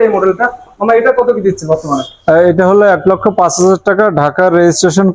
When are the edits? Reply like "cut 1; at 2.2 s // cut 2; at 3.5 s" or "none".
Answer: none